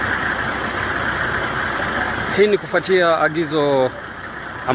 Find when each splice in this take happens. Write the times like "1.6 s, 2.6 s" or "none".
2.0 s